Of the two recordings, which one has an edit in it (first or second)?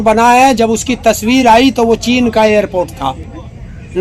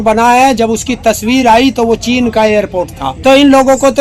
second